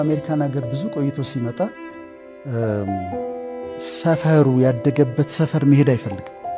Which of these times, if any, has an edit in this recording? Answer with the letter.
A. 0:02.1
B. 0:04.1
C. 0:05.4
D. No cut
D